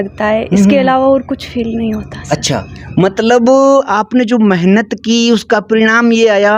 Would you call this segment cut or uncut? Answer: uncut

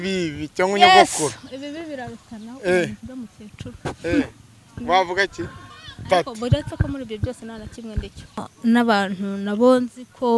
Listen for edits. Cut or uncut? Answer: cut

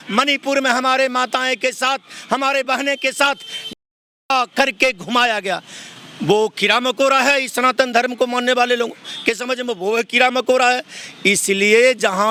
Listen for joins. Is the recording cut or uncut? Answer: uncut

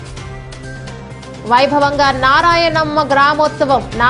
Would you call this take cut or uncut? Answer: cut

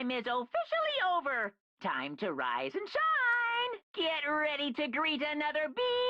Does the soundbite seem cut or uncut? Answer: cut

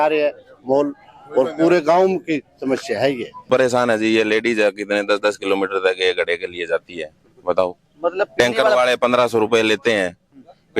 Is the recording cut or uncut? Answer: cut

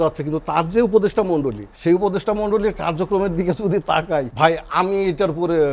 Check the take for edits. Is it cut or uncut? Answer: cut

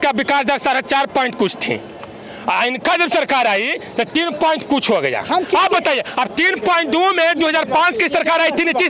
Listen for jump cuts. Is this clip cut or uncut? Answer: uncut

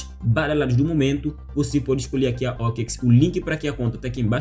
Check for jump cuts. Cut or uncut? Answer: uncut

